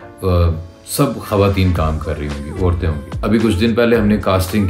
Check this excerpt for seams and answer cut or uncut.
cut